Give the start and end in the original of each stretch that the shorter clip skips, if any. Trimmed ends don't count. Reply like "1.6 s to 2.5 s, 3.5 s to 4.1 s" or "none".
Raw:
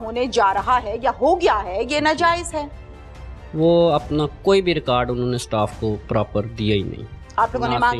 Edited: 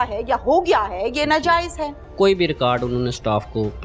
2.8 s to 4.3 s

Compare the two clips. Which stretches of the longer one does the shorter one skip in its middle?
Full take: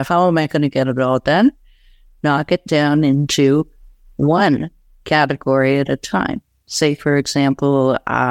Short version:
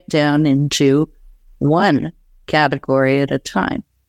none

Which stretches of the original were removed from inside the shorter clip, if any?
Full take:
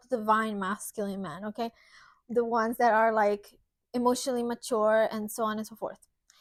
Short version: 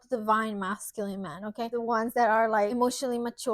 1.7 s to 2.4 s, 3.4 s to 4.0 s

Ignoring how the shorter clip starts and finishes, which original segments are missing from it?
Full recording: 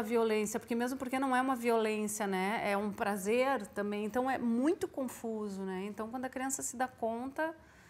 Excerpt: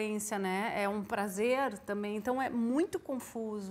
none

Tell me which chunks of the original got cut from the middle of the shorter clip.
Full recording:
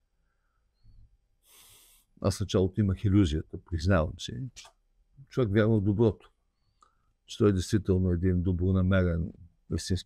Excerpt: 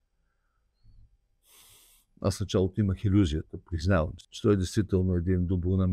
4.2 s to 7.2 s

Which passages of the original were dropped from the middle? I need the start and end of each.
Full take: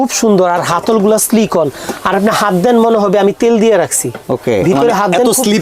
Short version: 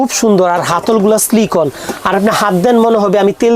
none

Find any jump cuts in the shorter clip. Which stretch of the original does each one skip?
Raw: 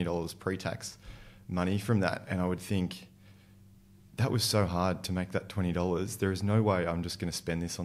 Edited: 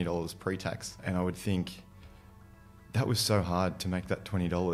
1.0 s to 2.2 s

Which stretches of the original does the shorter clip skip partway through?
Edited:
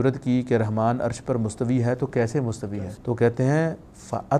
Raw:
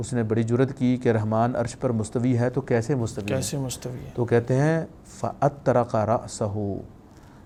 3.3 s to 3.9 s

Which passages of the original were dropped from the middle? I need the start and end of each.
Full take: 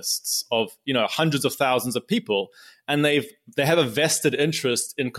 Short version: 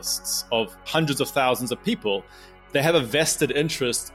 0.9 s to 1.1 s, 2.8 s to 3.4 s

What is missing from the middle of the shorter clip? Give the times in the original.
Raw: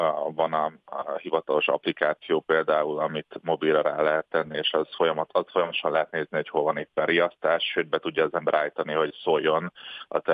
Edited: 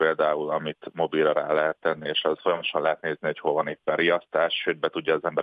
4.9 s to 5.5 s

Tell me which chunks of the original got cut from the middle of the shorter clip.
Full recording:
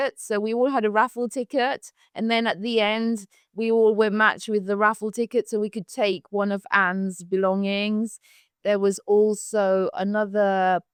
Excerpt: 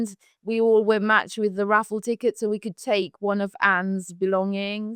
none

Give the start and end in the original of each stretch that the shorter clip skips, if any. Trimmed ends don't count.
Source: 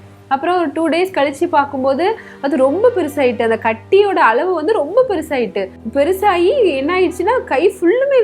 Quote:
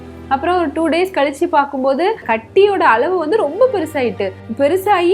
2.3 s to 3.6 s

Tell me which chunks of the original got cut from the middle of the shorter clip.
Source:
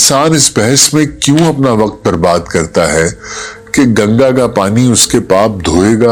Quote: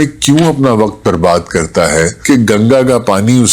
3.2 s to 3.6 s

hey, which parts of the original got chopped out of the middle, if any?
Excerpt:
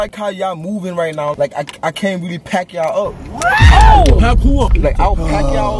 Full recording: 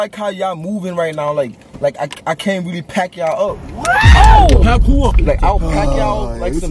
1.3 s to 1.8 s

